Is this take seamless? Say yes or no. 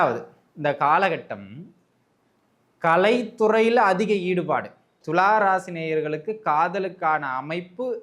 no